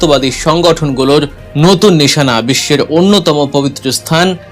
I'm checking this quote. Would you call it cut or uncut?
cut